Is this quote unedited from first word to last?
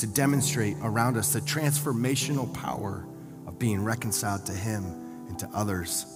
yes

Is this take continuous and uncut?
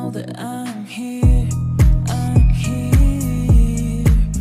yes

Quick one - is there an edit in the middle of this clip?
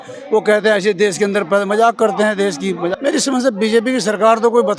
yes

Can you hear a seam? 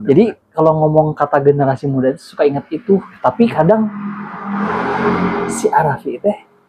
no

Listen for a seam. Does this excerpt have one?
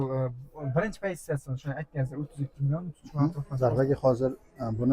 yes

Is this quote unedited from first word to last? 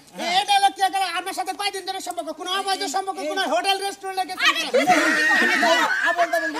yes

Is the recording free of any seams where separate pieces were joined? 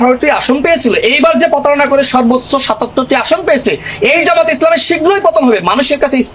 yes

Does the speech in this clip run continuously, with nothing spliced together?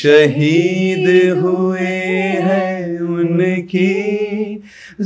yes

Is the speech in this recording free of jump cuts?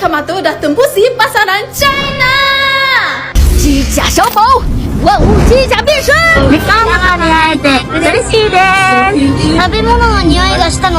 no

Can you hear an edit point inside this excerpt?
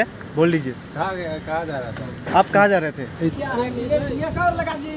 yes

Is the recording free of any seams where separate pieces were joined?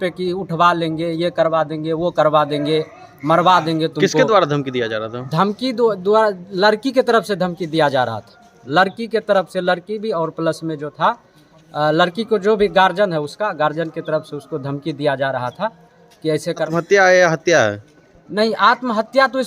no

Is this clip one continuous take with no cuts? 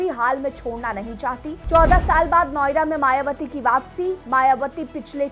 no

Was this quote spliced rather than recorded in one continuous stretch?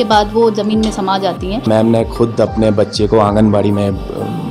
yes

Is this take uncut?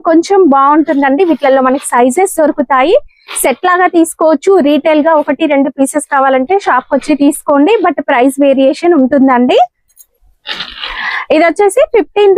yes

